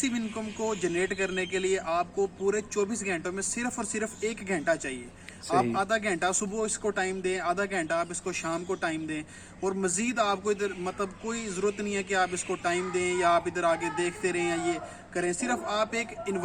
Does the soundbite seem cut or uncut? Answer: uncut